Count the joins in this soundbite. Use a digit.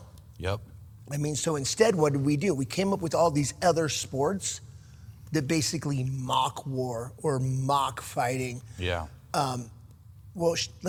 0